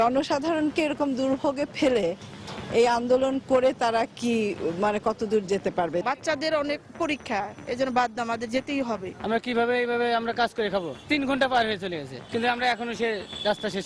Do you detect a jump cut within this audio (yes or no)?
yes